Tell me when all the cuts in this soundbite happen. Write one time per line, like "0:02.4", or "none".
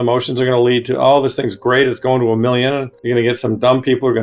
0:02.9